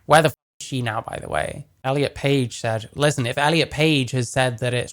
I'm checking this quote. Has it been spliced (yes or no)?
yes